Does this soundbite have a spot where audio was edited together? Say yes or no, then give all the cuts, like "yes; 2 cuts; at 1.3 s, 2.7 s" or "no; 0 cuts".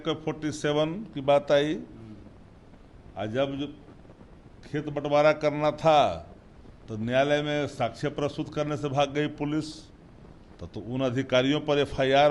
no; 0 cuts